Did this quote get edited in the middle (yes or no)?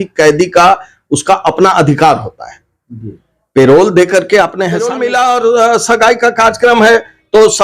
yes